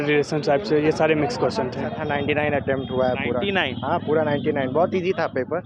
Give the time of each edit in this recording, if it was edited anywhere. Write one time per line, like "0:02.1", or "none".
0:01.9